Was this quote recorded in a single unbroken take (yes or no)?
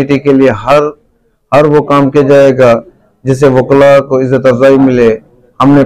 yes